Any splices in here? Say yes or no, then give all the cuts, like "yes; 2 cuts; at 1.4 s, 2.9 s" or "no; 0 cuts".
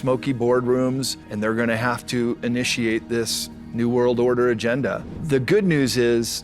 yes; 2 cuts; at 1.2 s, 5.1 s